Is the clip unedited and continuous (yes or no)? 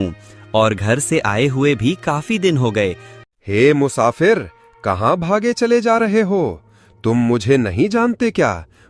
no